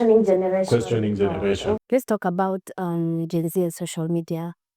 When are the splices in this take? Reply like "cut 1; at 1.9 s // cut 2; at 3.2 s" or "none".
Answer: cut 1; at 1.8 s